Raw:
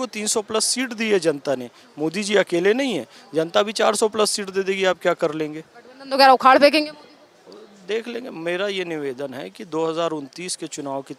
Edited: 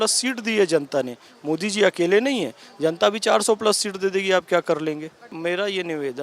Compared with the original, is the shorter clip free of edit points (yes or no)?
no